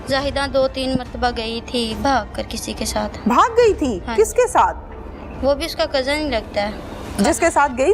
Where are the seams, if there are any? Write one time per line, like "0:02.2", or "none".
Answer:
none